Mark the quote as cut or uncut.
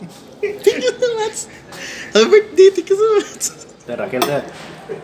cut